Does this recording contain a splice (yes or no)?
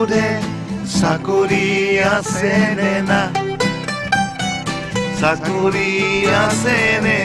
no